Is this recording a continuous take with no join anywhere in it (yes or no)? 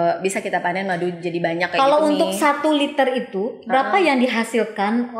yes